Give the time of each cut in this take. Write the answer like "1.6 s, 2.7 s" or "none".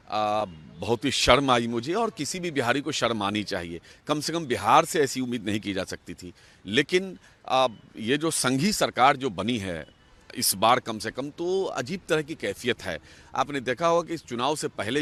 none